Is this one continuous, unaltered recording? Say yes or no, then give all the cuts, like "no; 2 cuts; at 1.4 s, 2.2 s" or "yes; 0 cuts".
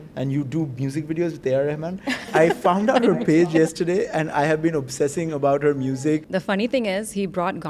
no; 2 cuts; at 2.3 s, 6.2 s